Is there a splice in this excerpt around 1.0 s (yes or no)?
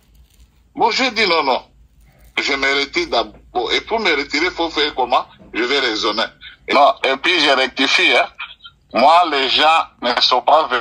no